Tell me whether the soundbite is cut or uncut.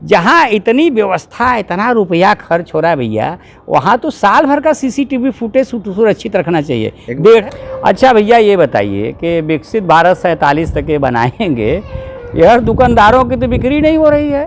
cut